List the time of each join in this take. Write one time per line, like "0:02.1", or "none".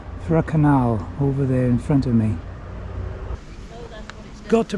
0:03.4